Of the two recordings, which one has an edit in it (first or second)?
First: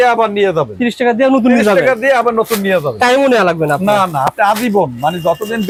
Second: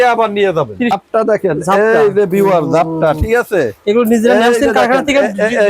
second